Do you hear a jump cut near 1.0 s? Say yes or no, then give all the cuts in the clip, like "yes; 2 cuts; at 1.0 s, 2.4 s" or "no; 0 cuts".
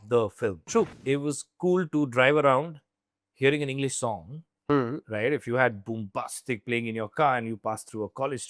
yes; 1 cut; at 1.0 s